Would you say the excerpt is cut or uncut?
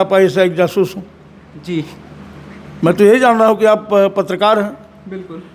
uncut